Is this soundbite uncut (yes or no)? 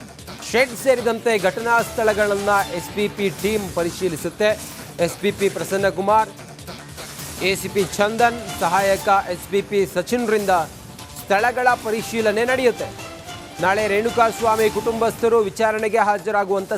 no